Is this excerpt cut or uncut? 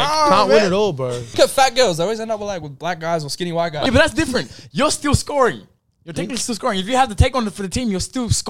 cut